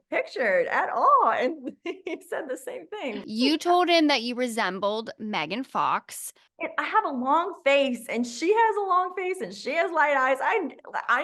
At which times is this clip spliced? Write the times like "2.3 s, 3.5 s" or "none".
3.2 s